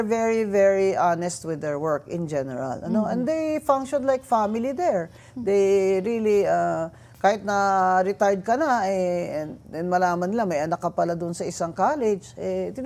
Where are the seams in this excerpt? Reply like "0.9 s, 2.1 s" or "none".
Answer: none